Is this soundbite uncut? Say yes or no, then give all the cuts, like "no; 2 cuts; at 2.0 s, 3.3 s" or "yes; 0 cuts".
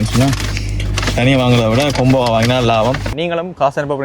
no; 1 cut; at 3.1 s